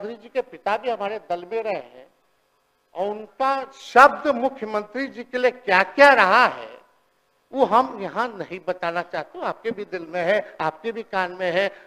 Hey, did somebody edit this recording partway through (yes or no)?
no